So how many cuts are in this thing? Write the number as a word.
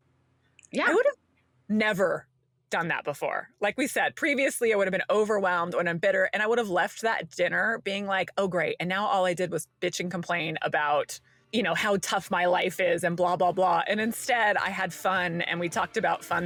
zero